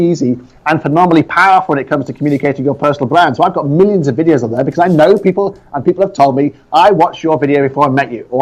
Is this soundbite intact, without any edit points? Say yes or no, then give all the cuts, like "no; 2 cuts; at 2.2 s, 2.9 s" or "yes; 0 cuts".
yes; 0 cuts